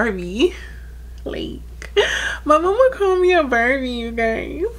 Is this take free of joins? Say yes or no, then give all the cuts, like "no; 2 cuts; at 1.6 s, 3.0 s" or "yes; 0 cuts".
yes; 0 cuts